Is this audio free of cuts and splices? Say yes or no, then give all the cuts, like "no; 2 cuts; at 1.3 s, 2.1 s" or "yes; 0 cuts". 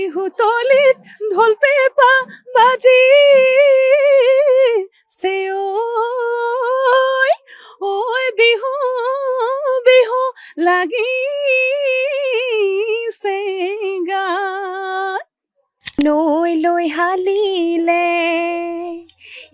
no; 1 cut; at 16.0 s